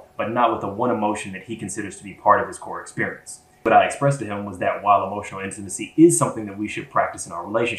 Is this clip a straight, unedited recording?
no; 1 cut; at 3.6 s

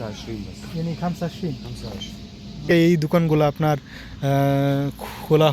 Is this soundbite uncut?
no; 1 cut; at 2.7 s

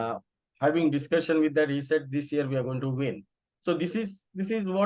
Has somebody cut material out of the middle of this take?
no; 0 cuts

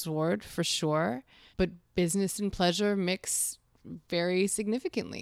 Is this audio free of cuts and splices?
no; 1 cut; at 1.4 s

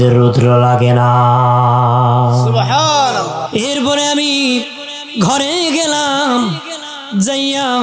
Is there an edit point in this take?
yes; 1 cut; at 3.4 s

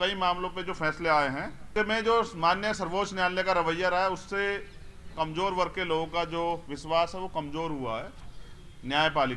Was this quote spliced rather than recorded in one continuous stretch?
yes; 1 cut; at 1.7 s

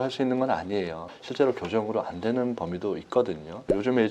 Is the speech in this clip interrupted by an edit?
no; 0 cuts

